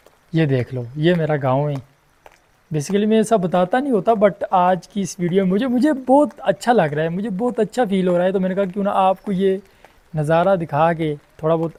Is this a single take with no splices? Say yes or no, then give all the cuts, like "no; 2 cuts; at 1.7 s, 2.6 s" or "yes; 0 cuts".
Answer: yes; 0 cuts